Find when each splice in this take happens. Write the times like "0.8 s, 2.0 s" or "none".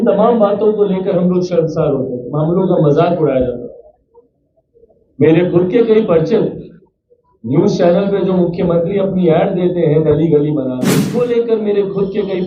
10.9 s